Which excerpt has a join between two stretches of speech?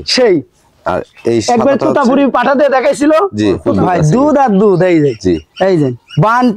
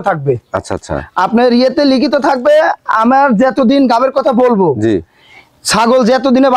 first; 1 cut; at 3.6 s

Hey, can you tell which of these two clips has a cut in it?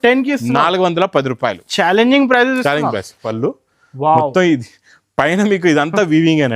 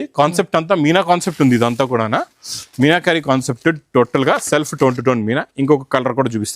first; 1 cut; at 3.2 s

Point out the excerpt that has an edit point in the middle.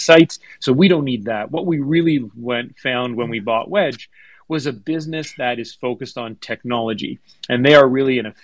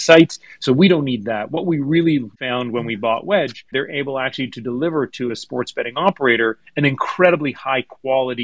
second; 2 cuts; at 2.3 s, 3.7 s

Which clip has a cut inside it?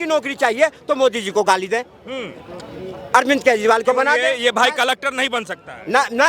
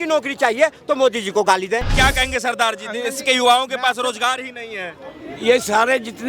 second; 1 cut; at 1.9 s

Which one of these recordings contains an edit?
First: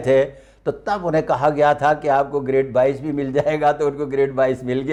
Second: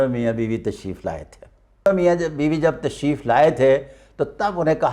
second; 1 cut; at 1.9 s

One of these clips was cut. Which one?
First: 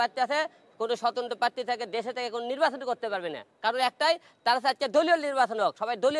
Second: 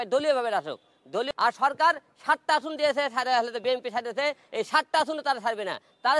second; 1 cut; at 1.3 s

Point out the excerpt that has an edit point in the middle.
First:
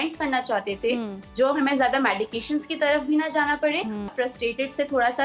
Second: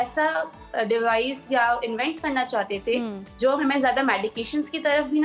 first; 1 cut; at 4.1 s

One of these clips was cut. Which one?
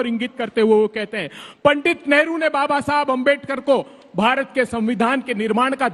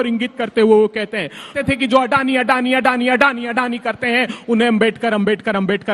second; 1 cut; at 1.5 s

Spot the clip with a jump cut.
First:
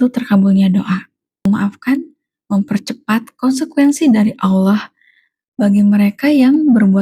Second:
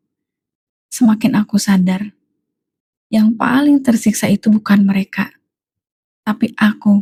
first; 1 cut; at 1.5 s

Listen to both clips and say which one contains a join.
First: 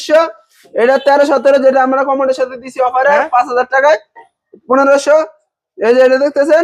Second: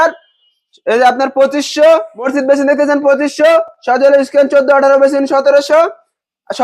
second; 1 cut; at 2.2 s

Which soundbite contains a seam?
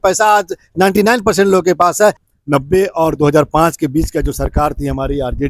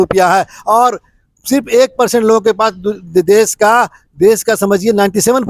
first; 1 cut; at 2.2 s

